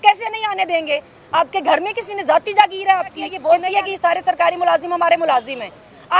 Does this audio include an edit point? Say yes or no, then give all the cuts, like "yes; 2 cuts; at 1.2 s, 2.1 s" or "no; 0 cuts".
yes; 1 cut; at 3.3 s